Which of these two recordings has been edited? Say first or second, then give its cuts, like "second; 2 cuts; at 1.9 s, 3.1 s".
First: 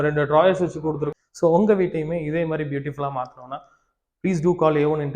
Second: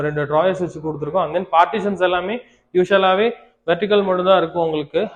first; 1 cut; at 1.0 s